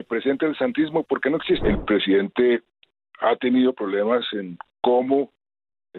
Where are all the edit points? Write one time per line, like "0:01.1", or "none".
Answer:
0:01.6